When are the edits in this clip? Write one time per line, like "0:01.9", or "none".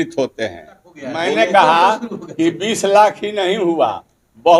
0:01.2